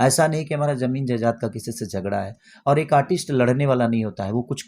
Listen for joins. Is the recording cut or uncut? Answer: uncut